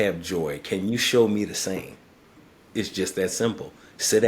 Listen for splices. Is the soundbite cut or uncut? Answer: cut